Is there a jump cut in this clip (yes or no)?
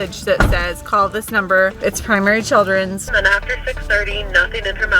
yes